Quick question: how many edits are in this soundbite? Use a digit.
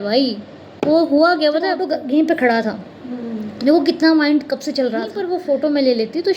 2